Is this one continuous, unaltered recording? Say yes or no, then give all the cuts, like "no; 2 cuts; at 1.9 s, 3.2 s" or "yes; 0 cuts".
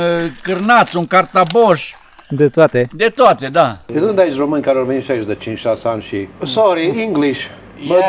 no; 2 cuts; at 3.8 s, 6.4 s